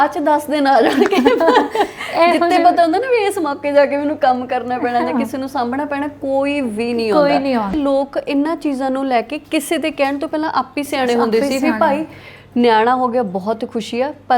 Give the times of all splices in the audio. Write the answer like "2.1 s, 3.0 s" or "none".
7.7 s